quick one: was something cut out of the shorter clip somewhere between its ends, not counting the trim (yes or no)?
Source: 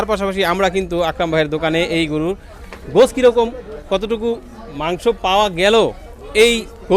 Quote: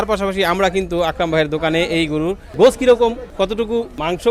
yes